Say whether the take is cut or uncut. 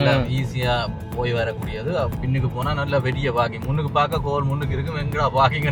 uncut